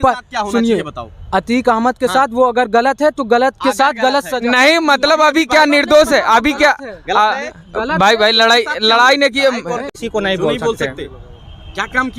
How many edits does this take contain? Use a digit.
1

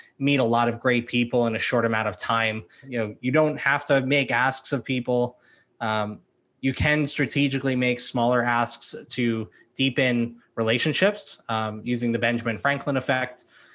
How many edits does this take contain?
1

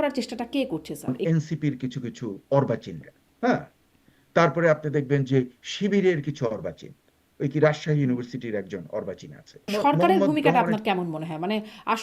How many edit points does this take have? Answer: 2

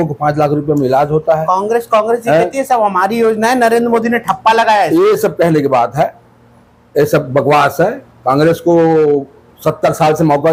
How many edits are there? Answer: 0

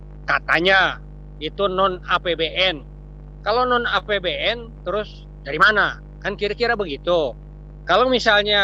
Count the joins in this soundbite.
0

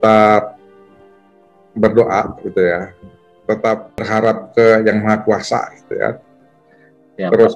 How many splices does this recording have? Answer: 1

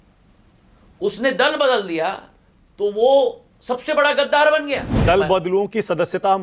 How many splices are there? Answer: 1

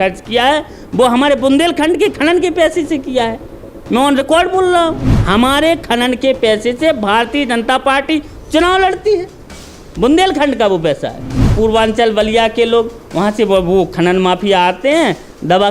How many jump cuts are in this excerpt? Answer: 2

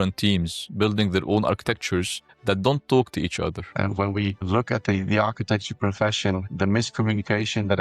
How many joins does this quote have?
1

